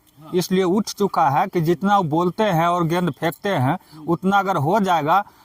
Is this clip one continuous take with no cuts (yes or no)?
yes